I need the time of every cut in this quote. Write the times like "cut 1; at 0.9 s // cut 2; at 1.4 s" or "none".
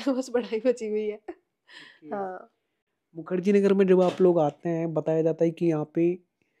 none

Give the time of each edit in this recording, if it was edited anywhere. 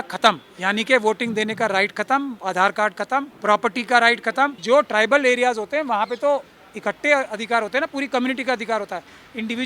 cut 1; at 3.3 s // cut 2; at 4.6 s

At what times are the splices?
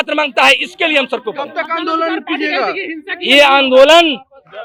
none

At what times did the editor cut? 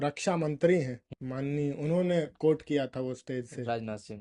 none

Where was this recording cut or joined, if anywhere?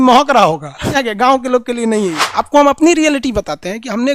cut 1; at 1.0 s // cut 2; at 2.2 s

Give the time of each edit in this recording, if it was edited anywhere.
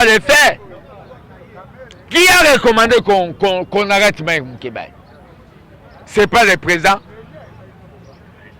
none

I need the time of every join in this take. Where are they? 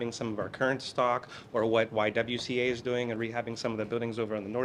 none

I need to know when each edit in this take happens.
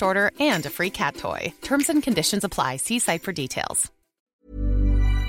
cut 1; at 4.2 s

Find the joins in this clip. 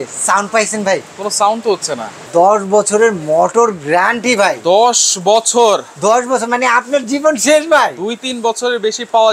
cut 1; at 2.2 s

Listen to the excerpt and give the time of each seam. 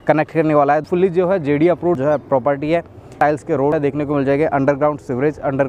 cut 1; at 0.8 s // cut 2; at 2.0 s // cut 3; at 3.5 s

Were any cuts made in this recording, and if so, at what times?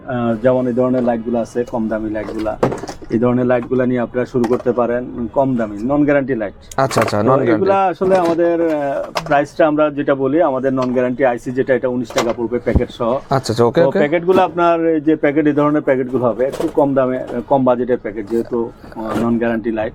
none

